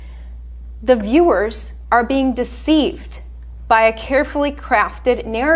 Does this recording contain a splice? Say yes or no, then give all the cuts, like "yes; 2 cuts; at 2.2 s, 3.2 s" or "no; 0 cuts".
no; 0 cuts